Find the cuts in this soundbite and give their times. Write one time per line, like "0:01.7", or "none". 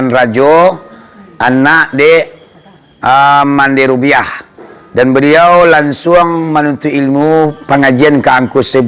none